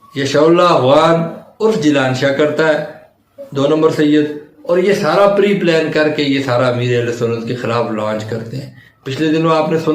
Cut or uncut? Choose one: uncut